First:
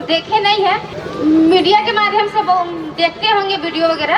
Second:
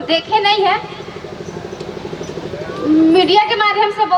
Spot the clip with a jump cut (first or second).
first